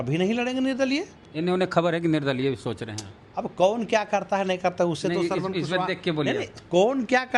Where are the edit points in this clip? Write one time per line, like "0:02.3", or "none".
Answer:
none